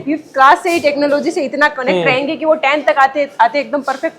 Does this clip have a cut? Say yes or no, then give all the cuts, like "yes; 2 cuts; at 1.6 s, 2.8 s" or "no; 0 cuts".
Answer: no; 0 cuts